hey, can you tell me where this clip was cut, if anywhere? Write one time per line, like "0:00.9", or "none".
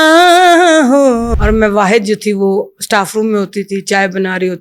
0:01.3